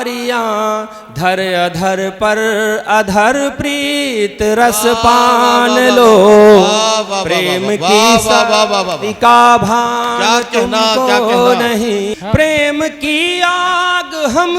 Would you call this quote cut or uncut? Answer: cut